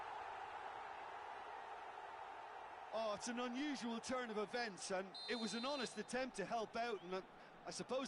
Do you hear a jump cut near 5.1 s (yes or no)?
no